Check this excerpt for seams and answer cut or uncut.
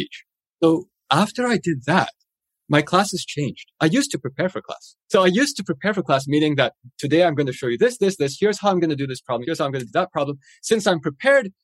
cut